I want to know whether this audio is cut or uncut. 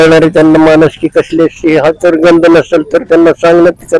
uncut